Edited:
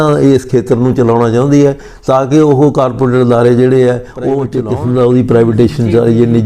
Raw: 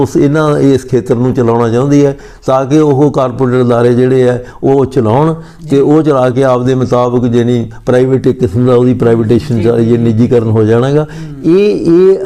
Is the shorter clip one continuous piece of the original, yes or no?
no